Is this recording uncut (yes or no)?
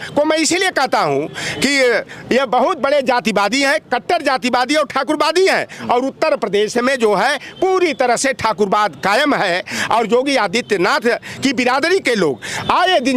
yes